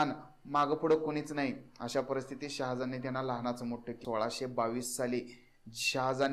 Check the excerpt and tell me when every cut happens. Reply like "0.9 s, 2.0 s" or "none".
3.9 s